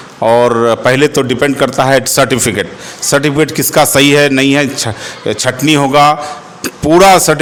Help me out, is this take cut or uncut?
uncut